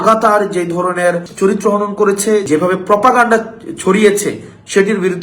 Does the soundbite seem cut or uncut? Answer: cut